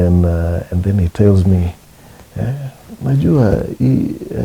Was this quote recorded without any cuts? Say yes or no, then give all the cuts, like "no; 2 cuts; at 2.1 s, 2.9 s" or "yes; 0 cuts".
yes; 0 cuts